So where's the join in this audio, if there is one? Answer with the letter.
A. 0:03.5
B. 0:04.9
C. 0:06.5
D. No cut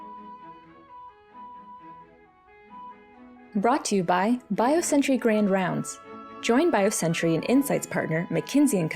A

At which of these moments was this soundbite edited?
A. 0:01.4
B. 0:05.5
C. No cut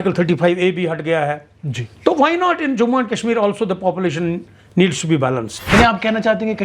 B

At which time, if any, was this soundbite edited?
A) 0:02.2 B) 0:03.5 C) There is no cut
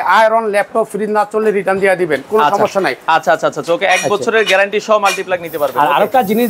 C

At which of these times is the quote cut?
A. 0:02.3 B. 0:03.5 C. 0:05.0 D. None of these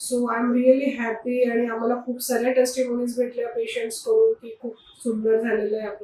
D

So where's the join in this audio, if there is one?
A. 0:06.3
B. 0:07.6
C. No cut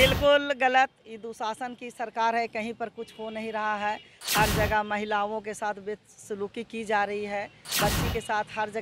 B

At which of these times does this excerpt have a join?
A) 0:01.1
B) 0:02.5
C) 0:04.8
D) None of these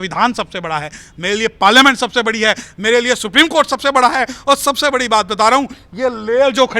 D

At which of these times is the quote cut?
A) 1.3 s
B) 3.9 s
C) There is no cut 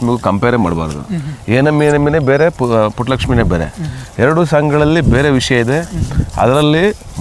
C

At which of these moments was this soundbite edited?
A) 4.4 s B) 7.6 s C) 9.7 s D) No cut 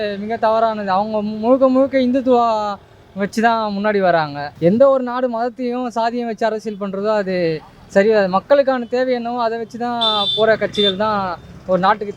A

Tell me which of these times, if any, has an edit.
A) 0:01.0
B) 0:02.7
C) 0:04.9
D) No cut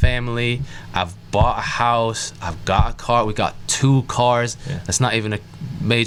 D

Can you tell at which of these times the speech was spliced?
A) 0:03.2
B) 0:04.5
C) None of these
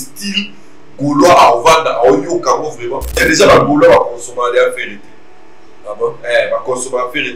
A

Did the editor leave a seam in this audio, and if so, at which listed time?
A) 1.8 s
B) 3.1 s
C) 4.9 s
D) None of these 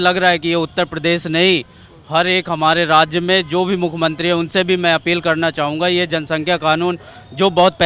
D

